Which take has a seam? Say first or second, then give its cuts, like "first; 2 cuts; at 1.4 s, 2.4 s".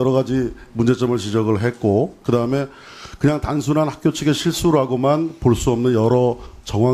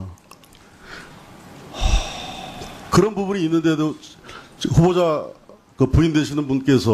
second; 1 cut; at 4.3 s